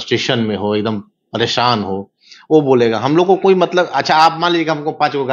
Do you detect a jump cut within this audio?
no; 0 cuts

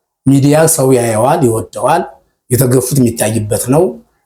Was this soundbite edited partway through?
no; 0 cuts

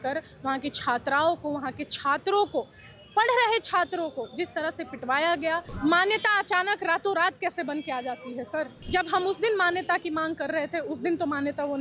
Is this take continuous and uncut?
no; 2 cuts; at 5.7 s, 8.8 s

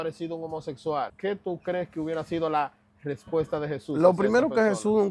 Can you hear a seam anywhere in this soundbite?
yes; 1 cut; at 1.1 s

